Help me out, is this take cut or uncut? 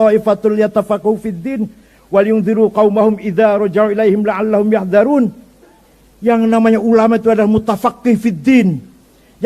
uncut